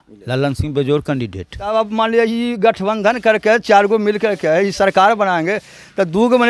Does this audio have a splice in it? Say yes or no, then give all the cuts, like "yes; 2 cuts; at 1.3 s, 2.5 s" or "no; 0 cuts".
yes; 1 cut; at 1.7 s